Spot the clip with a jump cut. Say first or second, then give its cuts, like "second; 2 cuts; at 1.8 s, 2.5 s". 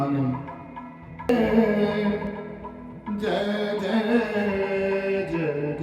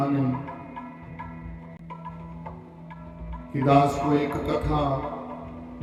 first; 1 cut; at 1.3 s